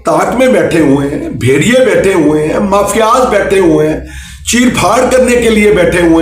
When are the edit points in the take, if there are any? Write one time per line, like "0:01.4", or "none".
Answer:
none